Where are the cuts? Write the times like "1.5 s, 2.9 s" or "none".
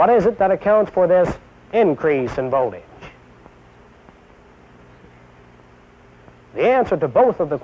4.4 s